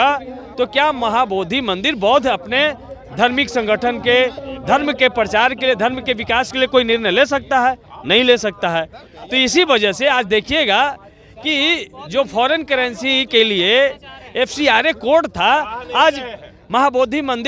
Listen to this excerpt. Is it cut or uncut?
uncut